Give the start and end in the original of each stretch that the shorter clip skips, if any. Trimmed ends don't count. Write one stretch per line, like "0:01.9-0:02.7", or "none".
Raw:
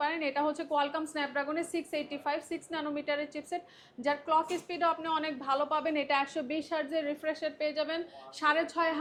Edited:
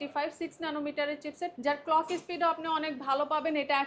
0:03.7-0:04.0